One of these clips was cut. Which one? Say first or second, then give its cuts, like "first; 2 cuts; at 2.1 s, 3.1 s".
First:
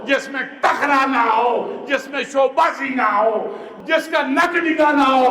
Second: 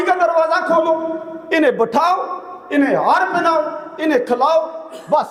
first; 1 cut; at 3.7 s